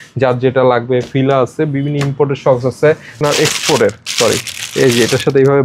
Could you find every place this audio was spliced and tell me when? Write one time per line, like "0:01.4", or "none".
0:03.2